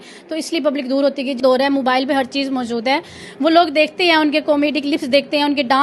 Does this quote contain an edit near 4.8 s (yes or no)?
no